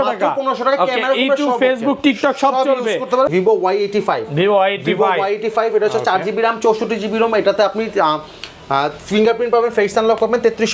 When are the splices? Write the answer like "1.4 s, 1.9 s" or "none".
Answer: 3.3 s